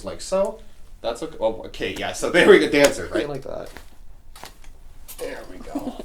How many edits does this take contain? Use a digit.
1